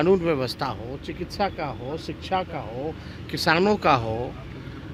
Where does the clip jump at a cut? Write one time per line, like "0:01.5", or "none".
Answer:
none